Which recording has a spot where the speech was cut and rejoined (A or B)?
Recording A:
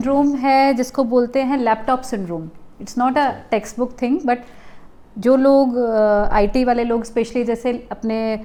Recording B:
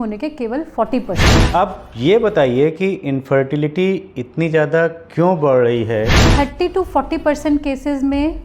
B